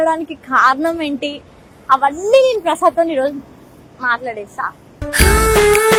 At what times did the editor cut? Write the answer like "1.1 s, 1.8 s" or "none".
none